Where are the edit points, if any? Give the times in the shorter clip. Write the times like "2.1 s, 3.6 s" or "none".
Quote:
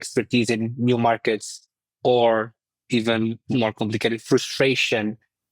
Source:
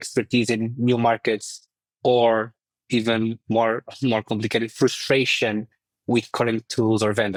3.4 s